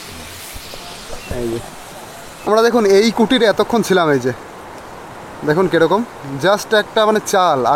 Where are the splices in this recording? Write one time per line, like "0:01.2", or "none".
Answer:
0:02.3